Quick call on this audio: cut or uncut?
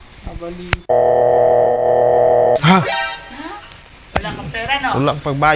uncut